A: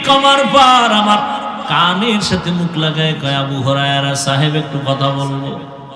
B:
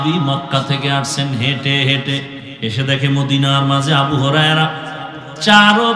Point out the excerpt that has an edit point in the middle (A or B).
B